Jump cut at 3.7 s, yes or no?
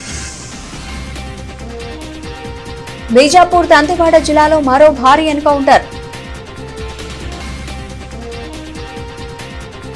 no